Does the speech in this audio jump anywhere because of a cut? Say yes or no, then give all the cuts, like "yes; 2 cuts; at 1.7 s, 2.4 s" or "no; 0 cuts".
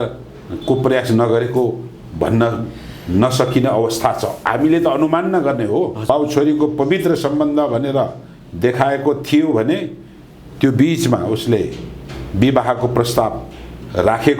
yes; 1 cut; at 6.0 s